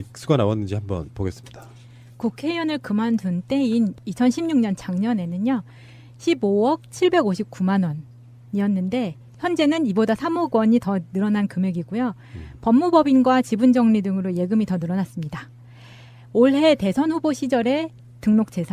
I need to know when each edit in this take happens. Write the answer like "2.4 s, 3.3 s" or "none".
10.3 s